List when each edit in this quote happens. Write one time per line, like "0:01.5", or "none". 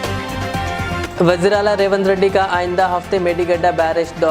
0:01.0